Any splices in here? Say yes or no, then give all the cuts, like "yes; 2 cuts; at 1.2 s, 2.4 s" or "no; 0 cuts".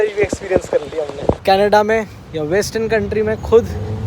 yes; 1 cut; at 1.4 s